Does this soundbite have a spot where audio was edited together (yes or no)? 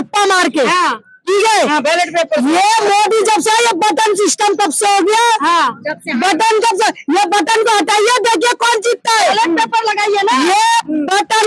no